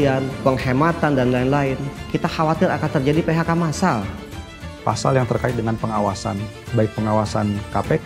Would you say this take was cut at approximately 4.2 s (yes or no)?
yes